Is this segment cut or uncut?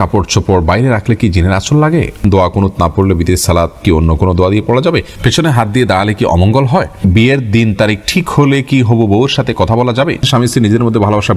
cut